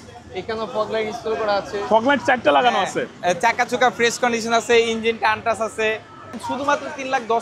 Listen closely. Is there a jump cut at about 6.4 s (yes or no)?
yes